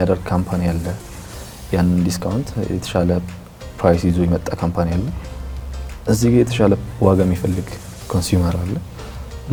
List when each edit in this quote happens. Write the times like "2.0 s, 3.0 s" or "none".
none

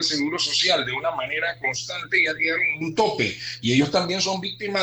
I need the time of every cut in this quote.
none

